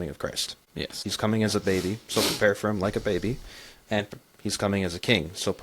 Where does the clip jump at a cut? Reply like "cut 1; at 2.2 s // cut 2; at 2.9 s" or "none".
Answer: cut 1; at 1.1 s